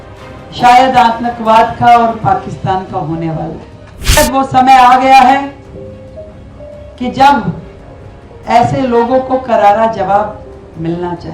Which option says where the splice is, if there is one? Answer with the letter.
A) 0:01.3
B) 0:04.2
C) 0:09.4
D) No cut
B